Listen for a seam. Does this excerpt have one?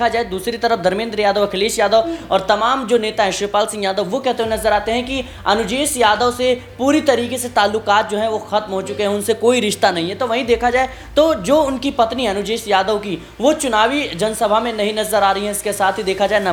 no; 0 cuts

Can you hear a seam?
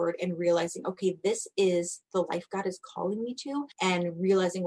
yes; 1 cut; at 3.7 s

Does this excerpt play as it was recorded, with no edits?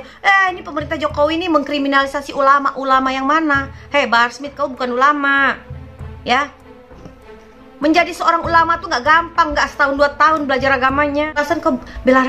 no; 1 cut; at 11.4 s

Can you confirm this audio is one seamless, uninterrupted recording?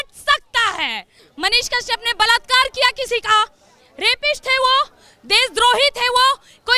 no; 1 cut; at 1.2 s

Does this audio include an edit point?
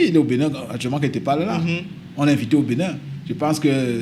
no; 0 cuts

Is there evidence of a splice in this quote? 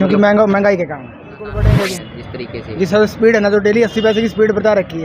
yes; 1 cut; at 1.8 s

